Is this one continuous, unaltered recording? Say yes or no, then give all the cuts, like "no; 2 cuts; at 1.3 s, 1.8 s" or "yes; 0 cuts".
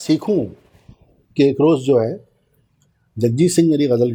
yes; 0 cuts